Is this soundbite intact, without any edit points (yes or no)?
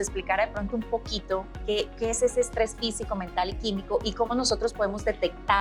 yes